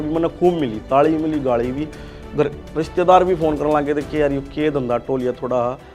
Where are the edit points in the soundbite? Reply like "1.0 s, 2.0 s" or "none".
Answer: none